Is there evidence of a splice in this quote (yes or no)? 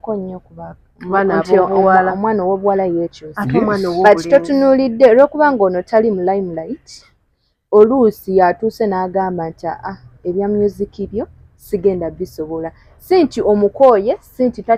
no